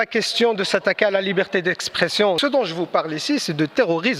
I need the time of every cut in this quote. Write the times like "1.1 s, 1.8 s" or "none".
2.4 s